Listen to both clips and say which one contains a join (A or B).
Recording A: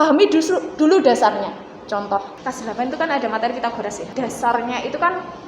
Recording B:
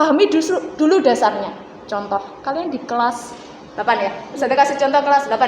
A